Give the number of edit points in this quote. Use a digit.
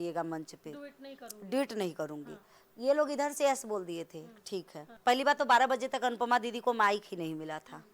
1